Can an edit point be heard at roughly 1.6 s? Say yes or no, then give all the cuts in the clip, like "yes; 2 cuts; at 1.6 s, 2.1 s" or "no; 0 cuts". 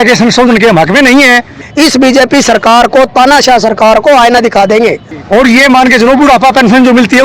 yes; 2 cuts; at 1.6 s, 5.1 s